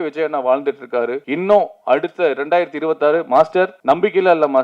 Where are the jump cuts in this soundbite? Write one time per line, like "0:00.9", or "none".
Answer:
0:01.2
0:03.8